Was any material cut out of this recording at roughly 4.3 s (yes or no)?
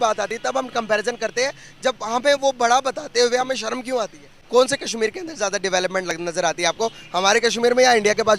yes